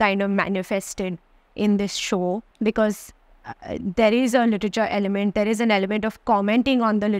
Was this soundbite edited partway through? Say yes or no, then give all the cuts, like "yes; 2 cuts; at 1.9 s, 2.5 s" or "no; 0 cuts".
yes; 1 cut; at 2.5 s